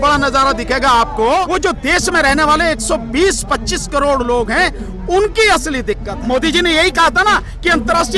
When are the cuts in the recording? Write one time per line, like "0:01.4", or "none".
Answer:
0:01.5
0:06.1